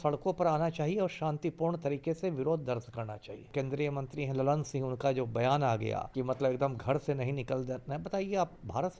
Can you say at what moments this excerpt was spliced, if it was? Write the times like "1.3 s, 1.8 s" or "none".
3.5 s, 6.1 s